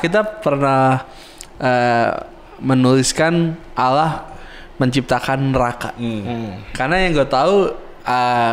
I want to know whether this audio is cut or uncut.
uncut